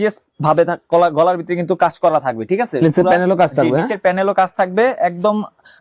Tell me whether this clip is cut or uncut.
uncut